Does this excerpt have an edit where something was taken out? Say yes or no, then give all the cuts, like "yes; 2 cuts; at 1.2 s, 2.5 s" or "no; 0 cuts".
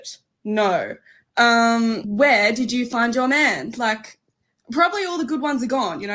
no; 0 cuts